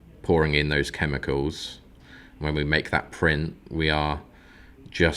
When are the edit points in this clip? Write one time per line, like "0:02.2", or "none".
0:01.9